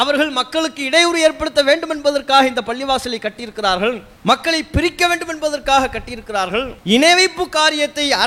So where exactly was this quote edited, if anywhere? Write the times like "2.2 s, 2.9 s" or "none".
4.1 s, 6.7 s